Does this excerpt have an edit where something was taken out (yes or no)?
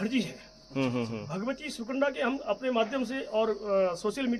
no